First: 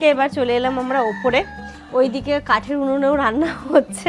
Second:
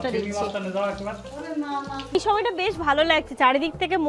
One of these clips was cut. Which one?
second; 1 cut; at 2.1 s

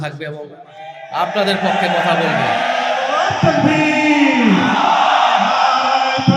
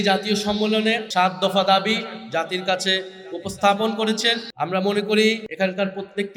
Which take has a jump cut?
second; 3 cuts; at 1.0 s, 4.5 s, 5.5 s

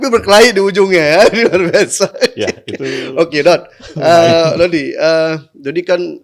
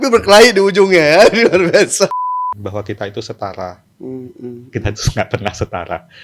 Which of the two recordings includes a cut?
second; 1 cut; at 2.1 s

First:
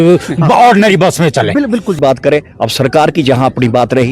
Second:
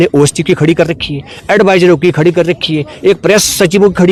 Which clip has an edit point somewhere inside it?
first; 1 cut; at 2.0 s

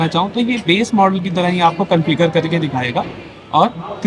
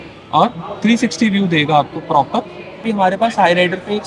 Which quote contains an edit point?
second; 1 cut; at 2.8 s

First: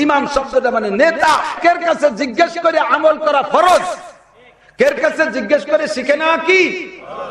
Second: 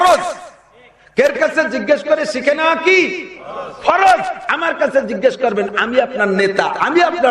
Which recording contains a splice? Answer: first; 1 cut; at 1.6 s

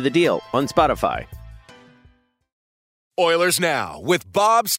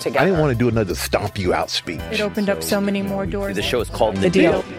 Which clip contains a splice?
first; 1 cut; at 2.9 s

